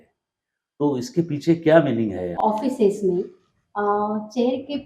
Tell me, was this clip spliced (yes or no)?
yes